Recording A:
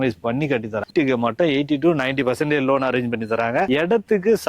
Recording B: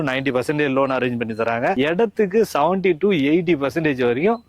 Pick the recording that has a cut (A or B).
A